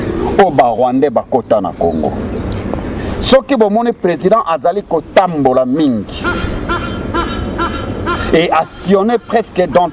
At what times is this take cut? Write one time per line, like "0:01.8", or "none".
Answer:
0:02.4